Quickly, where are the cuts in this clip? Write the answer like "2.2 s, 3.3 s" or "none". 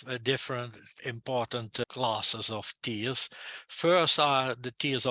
0.9 s, 1.9 s